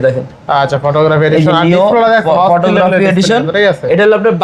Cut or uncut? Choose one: uncut